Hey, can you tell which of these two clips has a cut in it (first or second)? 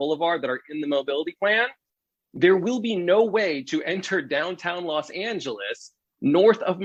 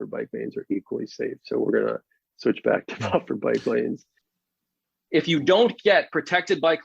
second